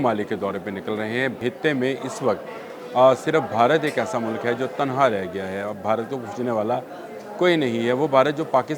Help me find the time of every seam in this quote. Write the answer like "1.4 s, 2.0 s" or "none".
1.4 s